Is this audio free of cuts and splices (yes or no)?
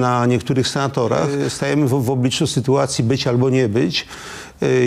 no